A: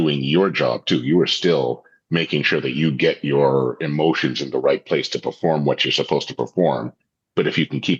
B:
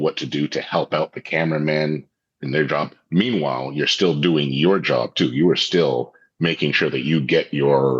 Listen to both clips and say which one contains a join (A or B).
B